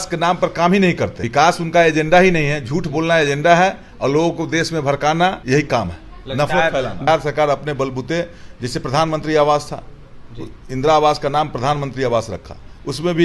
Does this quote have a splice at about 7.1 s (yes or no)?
yes